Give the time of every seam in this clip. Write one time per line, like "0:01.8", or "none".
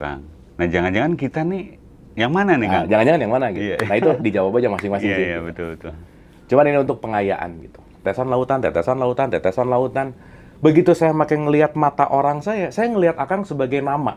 0:08.0